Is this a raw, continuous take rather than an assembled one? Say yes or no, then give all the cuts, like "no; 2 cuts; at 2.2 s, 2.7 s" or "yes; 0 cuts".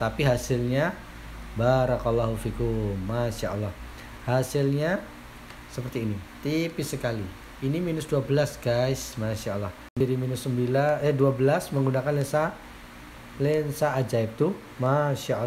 no; 1 cut; at 9.9 s